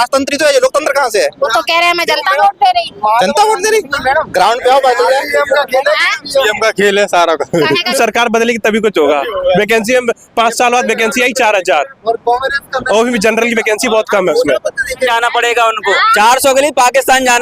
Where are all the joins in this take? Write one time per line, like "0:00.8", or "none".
0:07.9
0:15.1